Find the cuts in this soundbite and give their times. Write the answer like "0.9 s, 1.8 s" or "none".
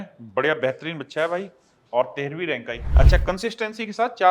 2.9 s

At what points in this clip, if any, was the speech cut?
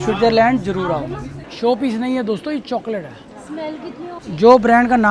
1.4 s, 4.2 s

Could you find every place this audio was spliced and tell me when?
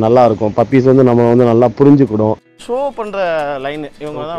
2.6 s

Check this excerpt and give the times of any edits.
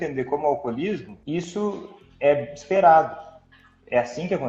1.1 s

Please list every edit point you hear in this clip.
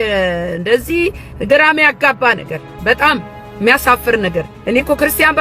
4.5 s

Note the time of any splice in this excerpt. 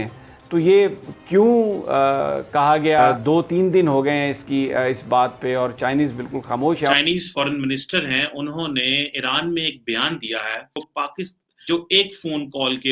3.2 s, 6.9 s, 11.2 s

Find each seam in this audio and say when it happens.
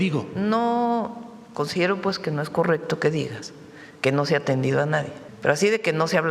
5.2 s

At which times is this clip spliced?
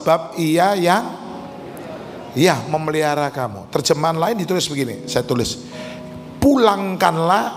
none

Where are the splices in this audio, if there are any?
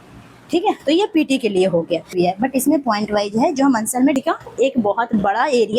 2.1 s, 4.2 s

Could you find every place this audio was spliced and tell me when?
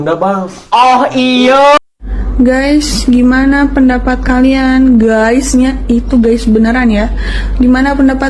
1.8 s

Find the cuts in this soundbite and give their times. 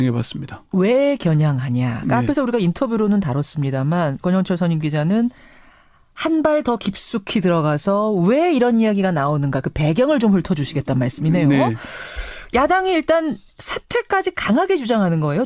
4.2 s

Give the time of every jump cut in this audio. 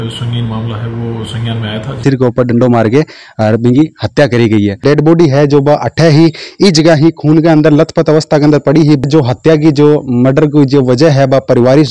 2.0 s, 4.8 s, 9.0 s

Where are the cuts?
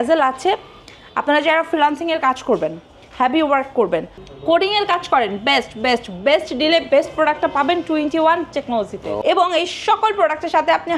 4.2 s, 9.1 s

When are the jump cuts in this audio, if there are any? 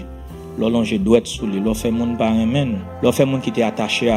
2.9 s

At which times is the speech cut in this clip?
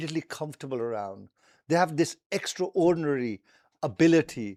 none

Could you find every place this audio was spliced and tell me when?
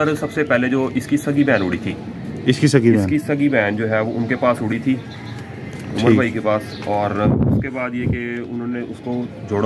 none

